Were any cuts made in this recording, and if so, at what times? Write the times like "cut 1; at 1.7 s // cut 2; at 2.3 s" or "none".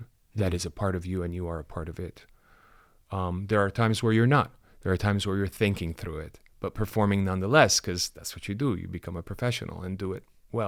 none